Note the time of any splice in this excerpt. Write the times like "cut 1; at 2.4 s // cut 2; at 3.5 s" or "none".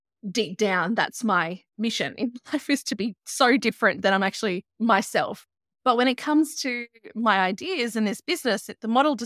cut 1; at 1.6 s // cut 2; at 4.7 s // cut 3; at 5.5 s